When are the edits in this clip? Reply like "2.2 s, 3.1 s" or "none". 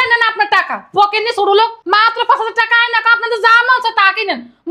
1.8 s